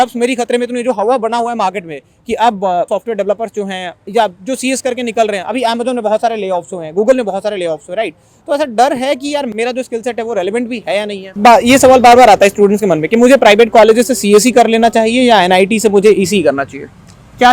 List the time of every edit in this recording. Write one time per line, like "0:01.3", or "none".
0:11.4